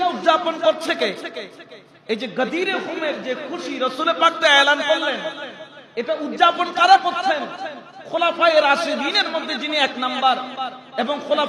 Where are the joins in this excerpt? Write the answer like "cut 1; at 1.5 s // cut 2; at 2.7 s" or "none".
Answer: none